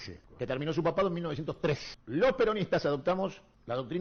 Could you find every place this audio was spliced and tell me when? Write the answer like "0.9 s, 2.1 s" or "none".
none

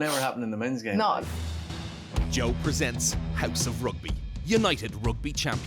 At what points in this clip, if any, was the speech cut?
1.2 s

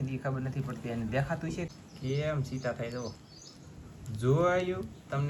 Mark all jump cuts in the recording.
1.7 s

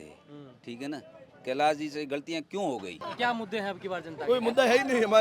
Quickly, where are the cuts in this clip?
3.0 s

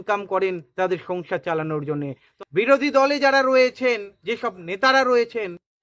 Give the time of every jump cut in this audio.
2.2 s

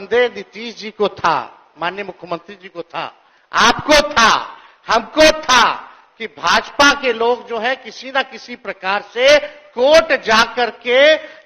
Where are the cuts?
none

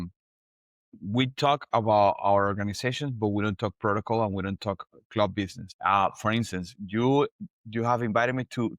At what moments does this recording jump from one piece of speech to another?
5.6 s

